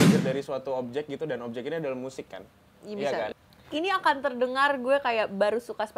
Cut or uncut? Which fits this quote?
cut